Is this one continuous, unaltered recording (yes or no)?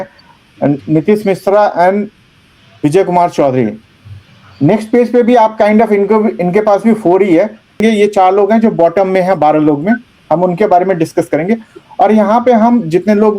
no